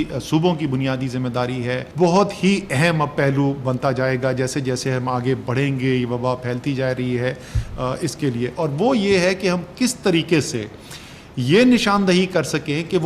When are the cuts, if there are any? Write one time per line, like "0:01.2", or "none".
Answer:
0:01.9